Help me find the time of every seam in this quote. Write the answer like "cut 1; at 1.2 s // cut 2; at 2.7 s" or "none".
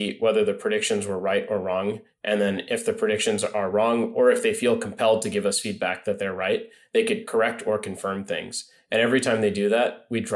cut 1; at 7.2 s